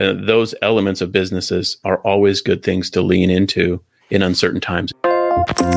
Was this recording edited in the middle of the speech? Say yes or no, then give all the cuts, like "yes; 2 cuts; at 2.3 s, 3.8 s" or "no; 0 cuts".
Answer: yes; 1 cut; at 4.9 s